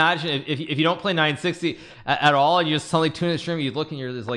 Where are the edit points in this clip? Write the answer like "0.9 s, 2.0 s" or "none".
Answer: none